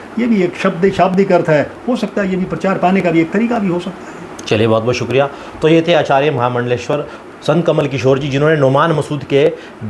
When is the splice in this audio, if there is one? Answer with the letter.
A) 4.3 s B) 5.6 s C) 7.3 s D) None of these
D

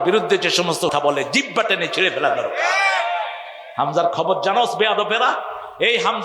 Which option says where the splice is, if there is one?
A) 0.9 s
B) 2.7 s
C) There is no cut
A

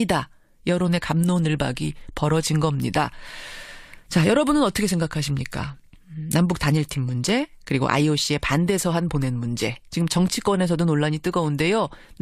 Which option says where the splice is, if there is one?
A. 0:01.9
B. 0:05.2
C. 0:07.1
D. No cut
B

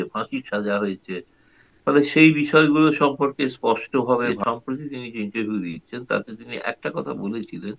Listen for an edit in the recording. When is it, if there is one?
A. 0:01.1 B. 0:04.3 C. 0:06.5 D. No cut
B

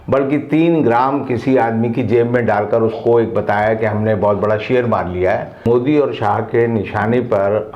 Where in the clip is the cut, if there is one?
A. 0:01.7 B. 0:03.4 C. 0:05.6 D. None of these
C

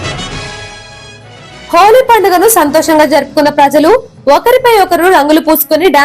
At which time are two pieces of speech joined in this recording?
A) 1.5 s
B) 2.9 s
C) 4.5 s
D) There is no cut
D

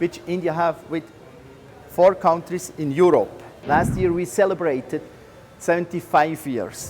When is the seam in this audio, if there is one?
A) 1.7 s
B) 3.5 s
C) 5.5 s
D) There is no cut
B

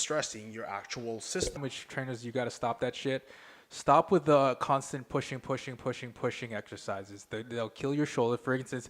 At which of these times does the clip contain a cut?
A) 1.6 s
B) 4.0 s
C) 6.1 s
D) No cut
A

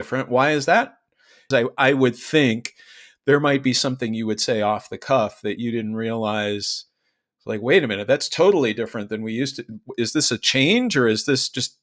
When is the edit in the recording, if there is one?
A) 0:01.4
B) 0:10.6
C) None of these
A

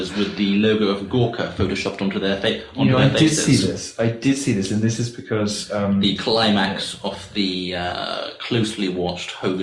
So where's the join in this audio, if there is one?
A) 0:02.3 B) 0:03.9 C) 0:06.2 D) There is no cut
D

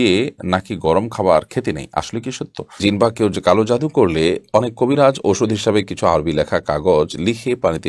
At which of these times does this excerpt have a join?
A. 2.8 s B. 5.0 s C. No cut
A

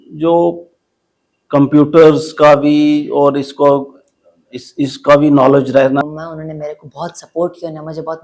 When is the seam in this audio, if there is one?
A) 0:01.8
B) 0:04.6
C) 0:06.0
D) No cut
C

